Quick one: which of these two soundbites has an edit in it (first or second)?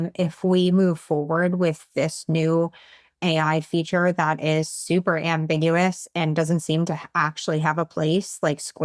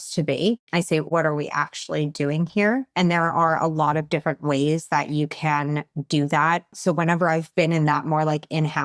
second